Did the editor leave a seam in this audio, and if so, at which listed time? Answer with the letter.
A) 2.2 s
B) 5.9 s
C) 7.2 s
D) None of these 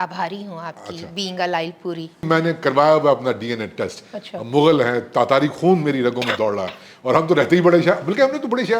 A